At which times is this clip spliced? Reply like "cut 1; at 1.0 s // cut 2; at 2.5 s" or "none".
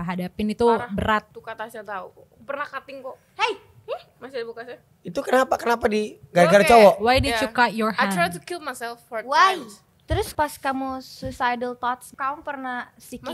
cut 1; at 1.4 s // cut 2; at 4.9 s // cut 3; at 10.1 s // cut 4; at 12.1 s